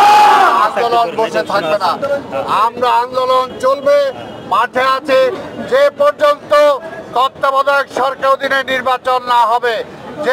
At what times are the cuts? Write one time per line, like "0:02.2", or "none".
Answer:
none